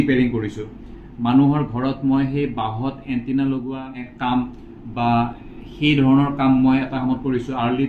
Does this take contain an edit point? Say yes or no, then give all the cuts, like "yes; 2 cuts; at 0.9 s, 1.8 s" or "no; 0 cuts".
yes; 1 cut; at 4.1 s